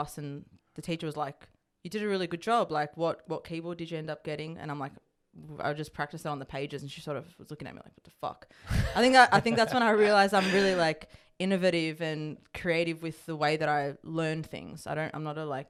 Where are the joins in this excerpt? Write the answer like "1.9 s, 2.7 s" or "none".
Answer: none